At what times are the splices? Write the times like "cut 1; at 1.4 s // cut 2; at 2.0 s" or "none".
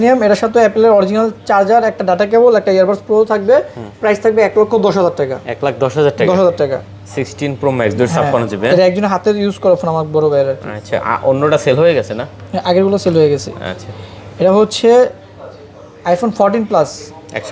none